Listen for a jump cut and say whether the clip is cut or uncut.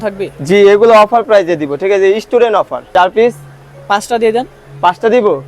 cut